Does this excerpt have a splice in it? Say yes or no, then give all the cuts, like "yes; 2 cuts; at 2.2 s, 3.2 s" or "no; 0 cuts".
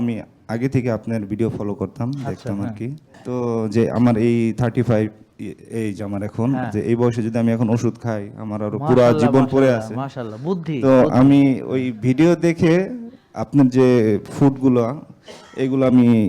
yes; 1 cut; at 3.1 s